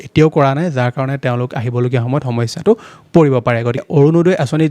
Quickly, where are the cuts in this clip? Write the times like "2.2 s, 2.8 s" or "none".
3.8 s